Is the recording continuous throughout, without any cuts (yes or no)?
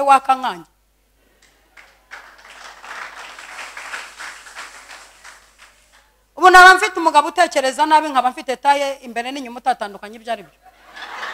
yes